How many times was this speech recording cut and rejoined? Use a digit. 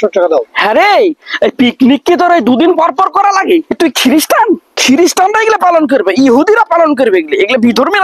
2